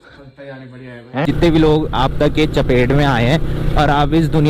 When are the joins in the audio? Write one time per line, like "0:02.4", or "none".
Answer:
0:01.2

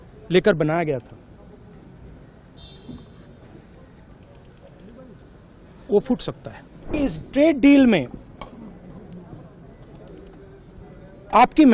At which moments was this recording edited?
0:06.9

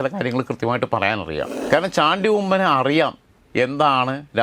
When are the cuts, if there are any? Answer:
0:01.5

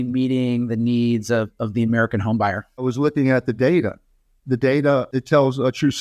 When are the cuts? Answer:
0:02.9
0:05.1

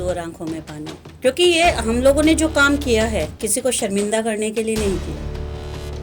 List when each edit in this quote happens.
0:01.2

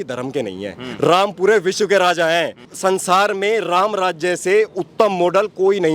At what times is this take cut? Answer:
0:02.7

